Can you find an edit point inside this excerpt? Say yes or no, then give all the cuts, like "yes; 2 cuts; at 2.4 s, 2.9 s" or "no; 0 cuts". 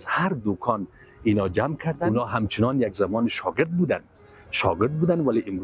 yes; 1 cut; at 2.0 s